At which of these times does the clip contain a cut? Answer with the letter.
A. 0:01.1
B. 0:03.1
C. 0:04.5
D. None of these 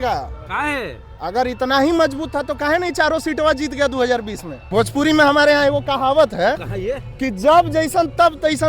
C